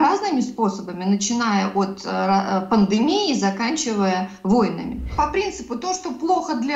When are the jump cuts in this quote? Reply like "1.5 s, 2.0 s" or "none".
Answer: 5.1 s

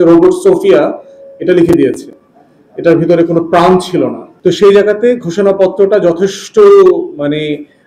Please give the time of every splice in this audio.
4.3 s

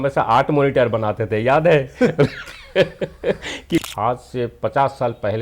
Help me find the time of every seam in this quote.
3.8 s

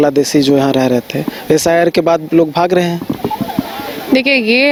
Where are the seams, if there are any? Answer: none

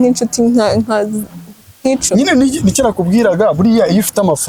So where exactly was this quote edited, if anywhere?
none

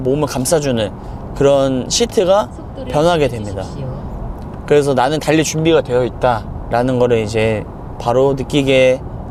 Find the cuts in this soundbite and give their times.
none

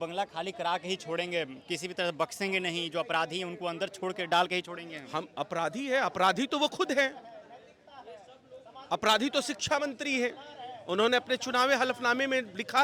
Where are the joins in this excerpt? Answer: none

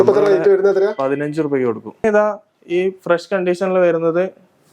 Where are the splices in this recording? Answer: 2.0 s

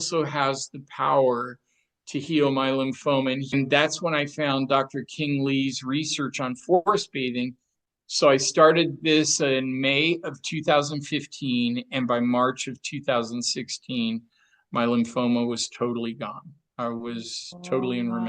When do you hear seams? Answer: 3.5 s, 7.8 s

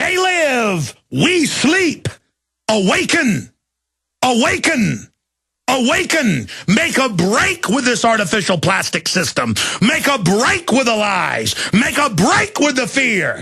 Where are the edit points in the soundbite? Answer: 3.4 s

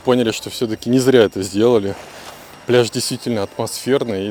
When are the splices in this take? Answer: none

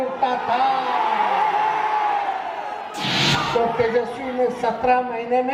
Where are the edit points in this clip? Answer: 3.1 s

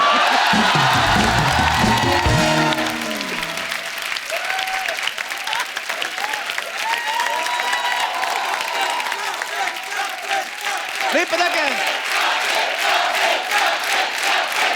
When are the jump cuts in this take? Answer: none

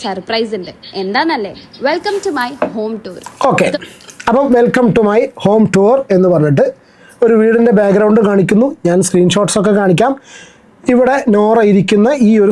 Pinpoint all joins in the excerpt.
none

